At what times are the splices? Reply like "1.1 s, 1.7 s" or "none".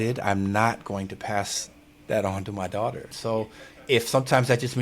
3.1 s